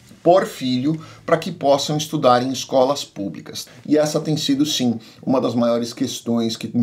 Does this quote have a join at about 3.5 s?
yes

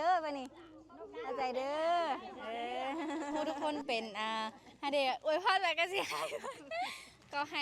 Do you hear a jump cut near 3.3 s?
yes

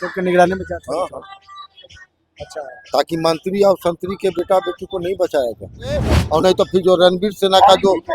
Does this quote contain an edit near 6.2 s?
yes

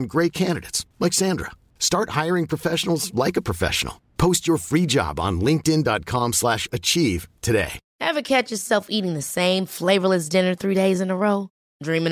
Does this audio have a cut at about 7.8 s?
yes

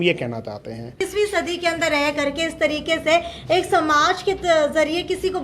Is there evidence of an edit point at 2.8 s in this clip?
no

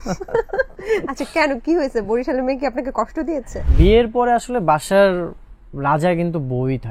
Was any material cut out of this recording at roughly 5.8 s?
no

